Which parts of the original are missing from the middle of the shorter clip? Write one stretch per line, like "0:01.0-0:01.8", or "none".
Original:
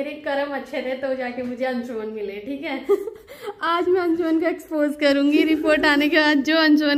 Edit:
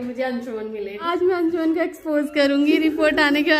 0:02.4-0:03.6